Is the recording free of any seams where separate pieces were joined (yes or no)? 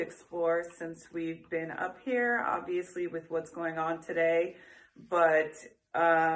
yes